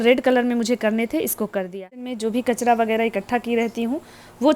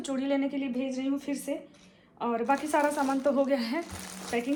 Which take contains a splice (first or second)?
first